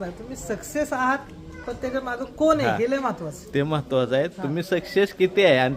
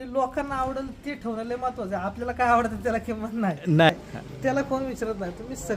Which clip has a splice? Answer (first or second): second